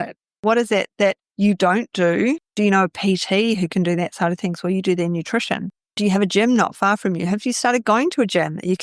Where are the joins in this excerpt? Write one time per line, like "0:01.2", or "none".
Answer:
none